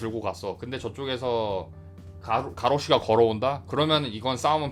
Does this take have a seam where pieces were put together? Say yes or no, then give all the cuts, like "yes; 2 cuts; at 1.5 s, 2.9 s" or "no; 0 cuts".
no; 0 cuts